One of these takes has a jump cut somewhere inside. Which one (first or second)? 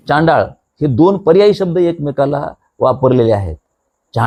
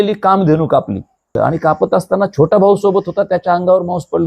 second